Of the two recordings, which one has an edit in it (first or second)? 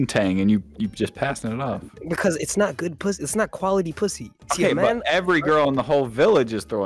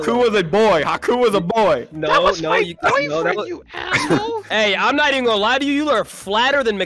second